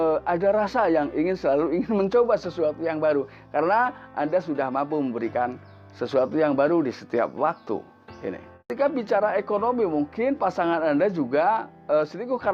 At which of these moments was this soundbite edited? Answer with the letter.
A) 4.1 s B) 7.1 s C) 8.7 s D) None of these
C